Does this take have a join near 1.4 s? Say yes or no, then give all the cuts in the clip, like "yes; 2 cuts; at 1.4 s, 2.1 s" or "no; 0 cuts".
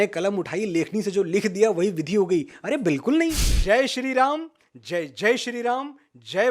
no; 1 cut; at 3.5 s